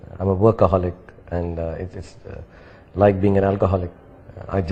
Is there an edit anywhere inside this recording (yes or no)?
no